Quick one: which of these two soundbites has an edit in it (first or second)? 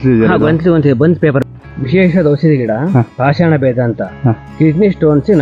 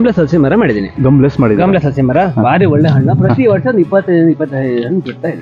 first